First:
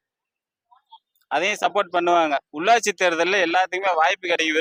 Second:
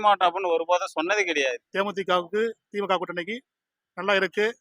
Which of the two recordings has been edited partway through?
second; 1 cut; at 1.6 s

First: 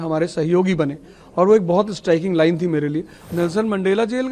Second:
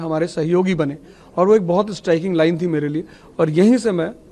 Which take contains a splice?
first; 1 cut; at 3.2 s

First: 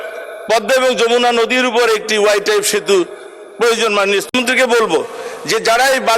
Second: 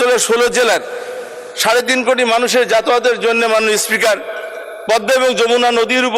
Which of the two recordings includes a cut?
first; 1 cut; at 4.3 s

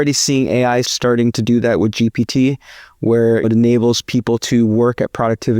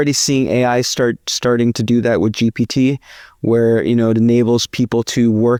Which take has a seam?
first; 2 cuts; at 0.9 s, 3.4 s

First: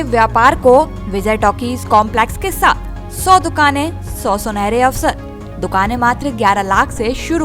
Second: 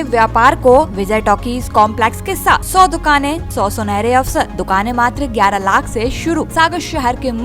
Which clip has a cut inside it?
second; 5 cuts; at 1.0 s, 2.7 s, 3.4 s, 4.6 s, 6.5 s

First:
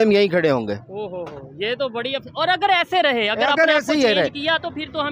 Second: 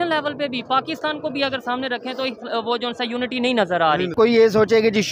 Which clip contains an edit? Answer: second; 1 cut; at 4.1 s

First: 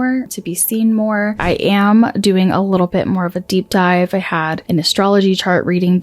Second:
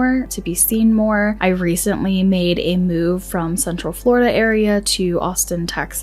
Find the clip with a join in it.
first; 2 cuts; at 1.4 s, 4.6 s

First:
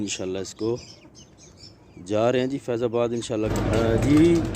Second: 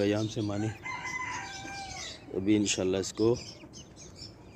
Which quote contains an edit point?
first; 1 cut; at 3.5 s

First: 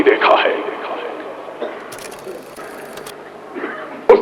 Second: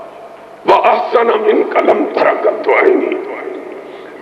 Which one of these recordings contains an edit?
first; 1 cut; at 2.6 s

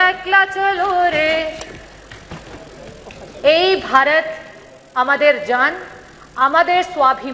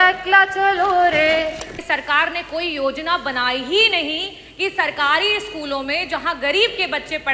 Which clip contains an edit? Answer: second; 1 cut; at 1.8 s

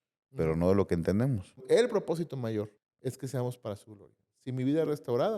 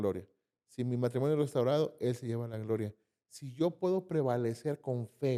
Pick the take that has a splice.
first; 2 cuts; at 1.6 s, 2.8 s

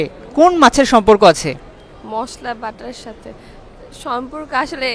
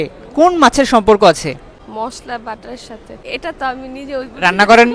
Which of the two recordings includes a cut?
second; 2 cuts; at 1.7 s, 3.2 s

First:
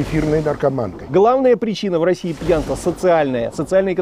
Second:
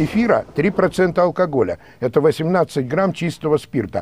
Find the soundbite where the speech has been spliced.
first; 1 cut; at 1.0 s

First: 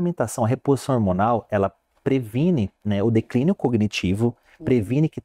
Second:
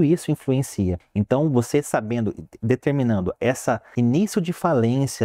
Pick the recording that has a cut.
second; 2 cuts; at 1.0 s, 3.9 s

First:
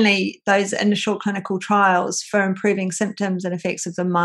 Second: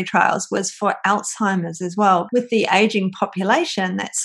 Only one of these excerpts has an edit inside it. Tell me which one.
second; 1 cut; at 2.2 s

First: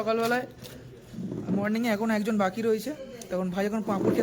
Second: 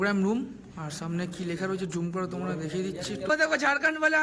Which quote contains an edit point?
second; 1 cut; at 3.3 s

